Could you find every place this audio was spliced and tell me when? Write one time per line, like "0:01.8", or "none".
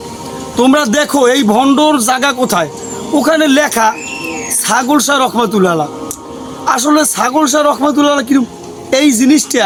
none